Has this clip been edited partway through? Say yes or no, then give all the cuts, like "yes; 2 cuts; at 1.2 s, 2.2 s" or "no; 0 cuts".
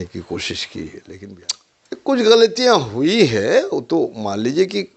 yes; 1 cut; at 1.1 s